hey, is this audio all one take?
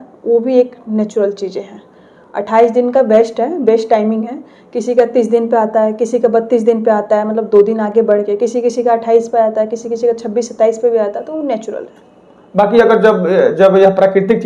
yes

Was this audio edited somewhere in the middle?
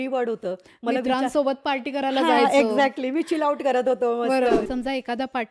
yes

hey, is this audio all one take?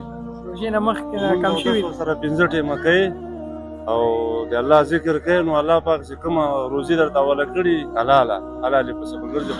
yes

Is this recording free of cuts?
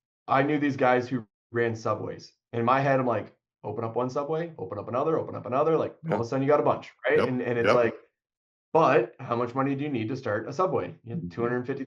yes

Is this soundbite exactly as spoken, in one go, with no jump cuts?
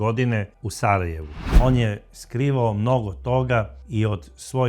no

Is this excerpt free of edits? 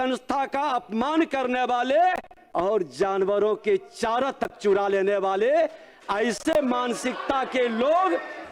no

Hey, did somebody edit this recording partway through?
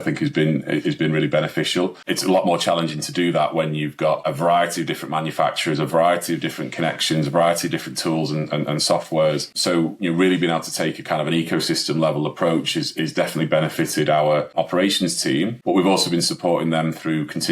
yes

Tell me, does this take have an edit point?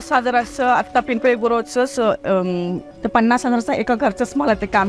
no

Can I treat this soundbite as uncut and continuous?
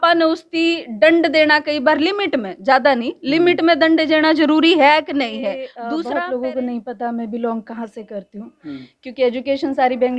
no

